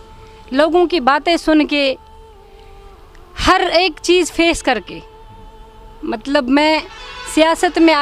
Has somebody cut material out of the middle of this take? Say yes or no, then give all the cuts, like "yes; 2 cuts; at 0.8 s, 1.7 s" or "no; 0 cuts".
no; 0 cuts